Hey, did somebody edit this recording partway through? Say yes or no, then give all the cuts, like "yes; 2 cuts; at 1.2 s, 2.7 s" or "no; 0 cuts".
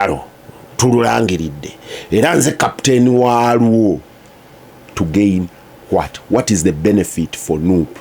no; 0 cuts